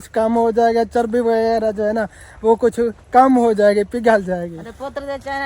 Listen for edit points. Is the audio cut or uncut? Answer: cut